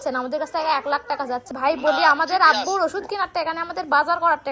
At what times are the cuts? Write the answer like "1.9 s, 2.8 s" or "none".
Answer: 1.5 s